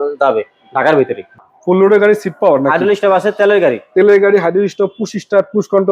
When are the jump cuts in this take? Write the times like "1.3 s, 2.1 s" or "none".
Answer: 1.4 s